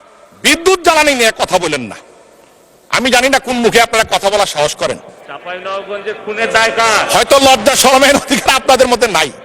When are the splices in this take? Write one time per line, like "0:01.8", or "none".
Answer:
none

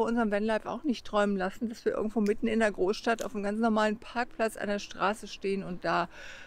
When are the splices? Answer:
none

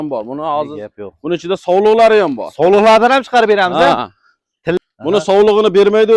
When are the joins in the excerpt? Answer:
0:04.8

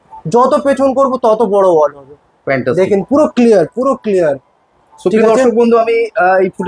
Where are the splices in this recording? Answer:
none

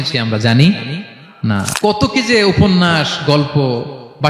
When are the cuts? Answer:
0:01.7

